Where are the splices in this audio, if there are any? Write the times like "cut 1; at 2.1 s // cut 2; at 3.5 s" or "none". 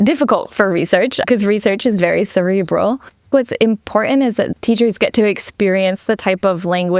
cut 1; at 3.3 s // cut 2; at 4.5 s